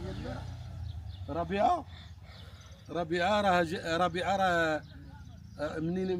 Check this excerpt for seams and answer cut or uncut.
uncut